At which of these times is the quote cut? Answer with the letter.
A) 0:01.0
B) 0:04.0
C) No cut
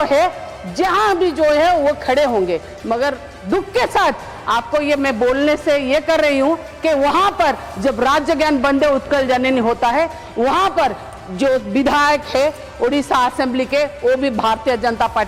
C